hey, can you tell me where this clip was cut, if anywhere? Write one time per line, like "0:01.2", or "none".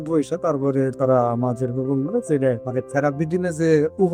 0:02.6